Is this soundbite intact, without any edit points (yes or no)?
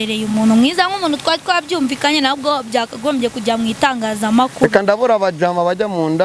yes